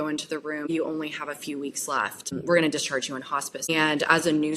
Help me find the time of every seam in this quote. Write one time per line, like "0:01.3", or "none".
0:00.7
0:02.2
0:03.7